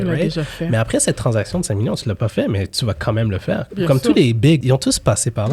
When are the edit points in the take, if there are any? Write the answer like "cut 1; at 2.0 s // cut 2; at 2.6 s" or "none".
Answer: cut 1; at 4.6 s